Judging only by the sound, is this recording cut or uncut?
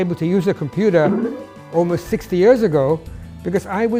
uncut